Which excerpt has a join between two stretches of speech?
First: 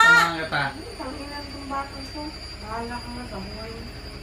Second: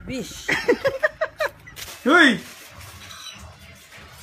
first; 1 cut; at 3.3 s

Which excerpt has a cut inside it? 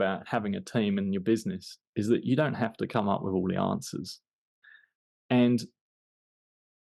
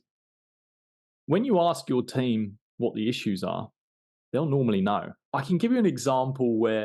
second; 1 cut; at 5.2 s

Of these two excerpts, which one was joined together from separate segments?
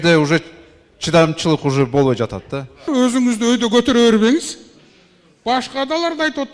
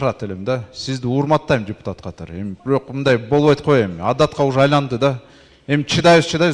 first; 1 cut; at 2.9 s

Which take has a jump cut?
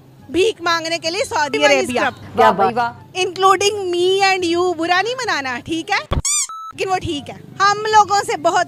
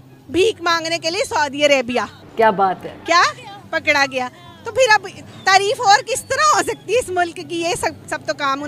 first; 2 cuts; at 2.7 s, 6.5 s

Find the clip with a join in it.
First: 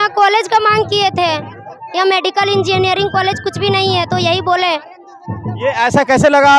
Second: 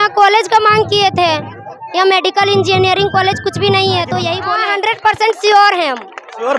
second; 1 cut; at 4.5 s

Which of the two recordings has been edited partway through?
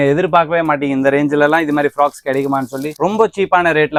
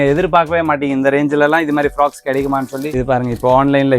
second; 1 cut; at 2.9 s

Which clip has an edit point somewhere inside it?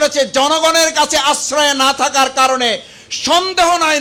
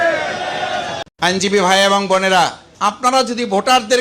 second; 2 cuts; at 1.0 s, 2.6 s

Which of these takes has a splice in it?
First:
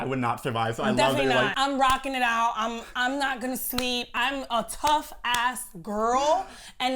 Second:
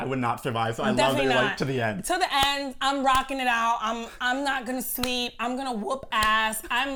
first; 2 cuts; at 1.5 s, 4.1 s

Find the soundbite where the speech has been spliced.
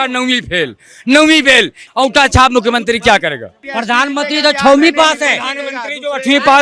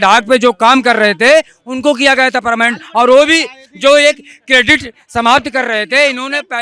first; 2 cuts; at 1.8 s, 3.5 s

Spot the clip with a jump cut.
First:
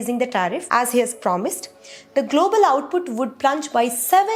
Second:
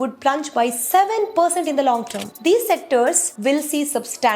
second; 1 cut; at 2.2 s

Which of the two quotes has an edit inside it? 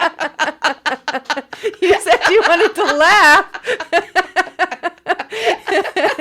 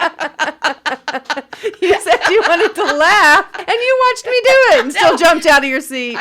second; 1 cut; at 3.5 s

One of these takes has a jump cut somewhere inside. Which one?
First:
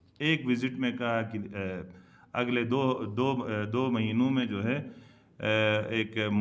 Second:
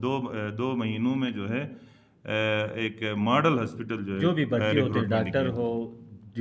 second; 1 cut; at 4.2 s

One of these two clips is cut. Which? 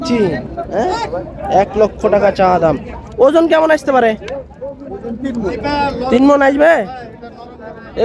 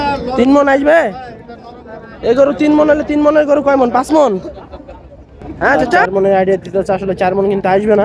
second; 1 cut; at 6.0 s

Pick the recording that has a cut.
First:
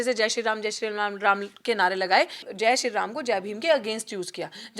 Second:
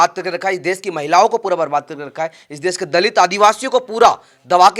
first; 1 cut; at 2.4 s

